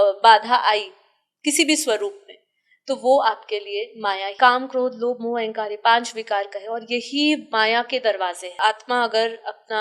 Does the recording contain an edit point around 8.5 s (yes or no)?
yes